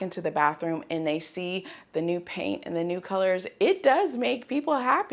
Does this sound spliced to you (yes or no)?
no